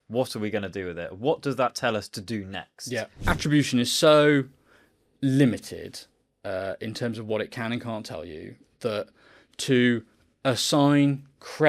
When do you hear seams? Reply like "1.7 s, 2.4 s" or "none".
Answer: 3.1 s